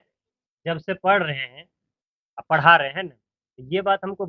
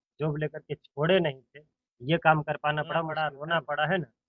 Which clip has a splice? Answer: second; 1 cut; at 3.1 s

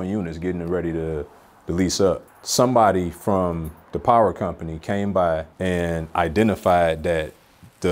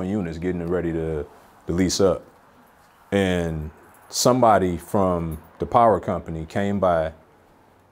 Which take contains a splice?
first; 2 cuts; at 2.4 s, 5.5 s

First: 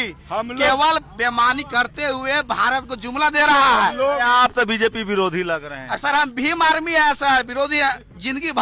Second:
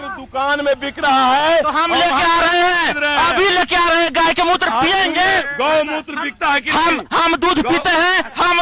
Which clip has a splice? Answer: second; 1 cut; at 5.5 s

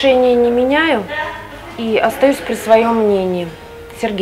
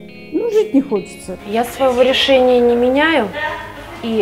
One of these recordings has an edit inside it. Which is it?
second; 1 cut; at 1.2 s

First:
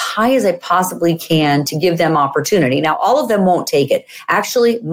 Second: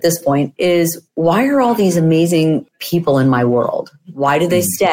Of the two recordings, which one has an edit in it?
second; 1 cut; at 2.7 s

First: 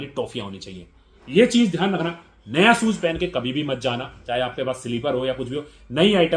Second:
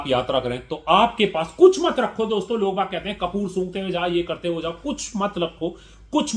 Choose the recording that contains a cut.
first; 1 cut; at 1.2 s

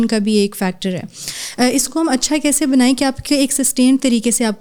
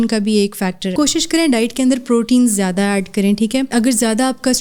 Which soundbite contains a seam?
second; 2 cuts; at 0.9 s, 3.7 s

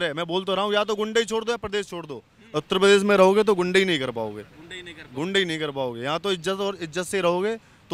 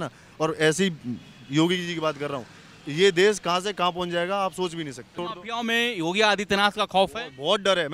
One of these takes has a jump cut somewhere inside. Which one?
second; 1 cut; at 5.2 s

